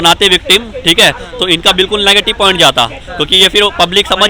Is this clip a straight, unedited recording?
yes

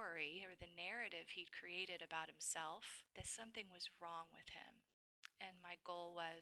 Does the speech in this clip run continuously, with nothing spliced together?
no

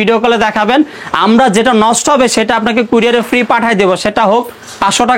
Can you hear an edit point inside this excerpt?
no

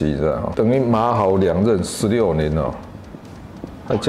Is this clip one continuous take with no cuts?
yes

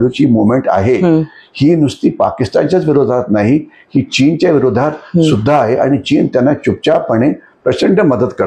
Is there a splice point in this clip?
no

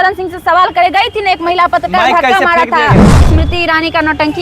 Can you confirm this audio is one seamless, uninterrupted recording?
no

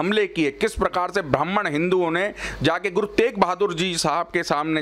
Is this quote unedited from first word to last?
yes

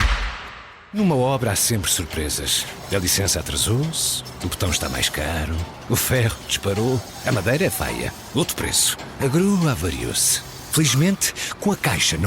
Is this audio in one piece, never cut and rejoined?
no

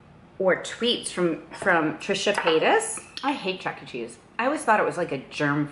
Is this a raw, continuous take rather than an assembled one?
no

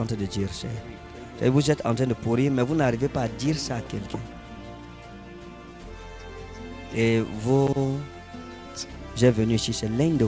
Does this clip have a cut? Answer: no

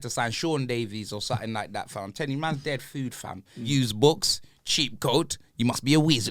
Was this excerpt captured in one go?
no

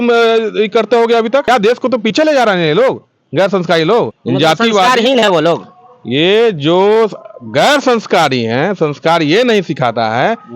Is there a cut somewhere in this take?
yes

